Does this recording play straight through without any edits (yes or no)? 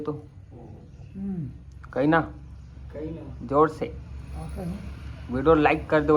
yes